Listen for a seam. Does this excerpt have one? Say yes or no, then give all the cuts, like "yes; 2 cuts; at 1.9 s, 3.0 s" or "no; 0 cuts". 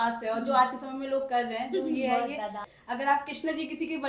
yes; 1 cut; at 2.7 s